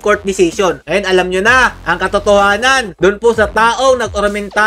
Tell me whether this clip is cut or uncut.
uncut